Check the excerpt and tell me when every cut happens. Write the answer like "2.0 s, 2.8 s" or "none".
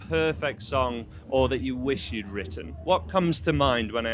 none